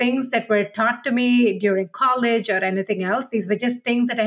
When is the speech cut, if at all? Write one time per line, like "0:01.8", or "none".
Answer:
none